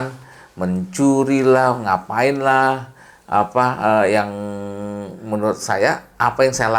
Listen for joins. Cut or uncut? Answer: uncut